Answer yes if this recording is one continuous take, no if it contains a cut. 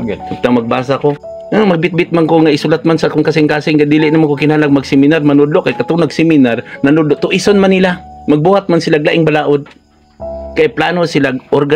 no